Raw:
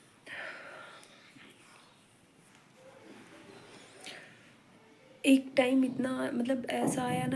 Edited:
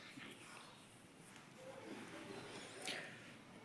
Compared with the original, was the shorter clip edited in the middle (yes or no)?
no